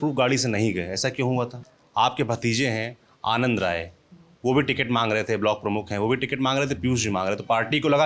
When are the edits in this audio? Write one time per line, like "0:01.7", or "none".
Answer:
0:01.6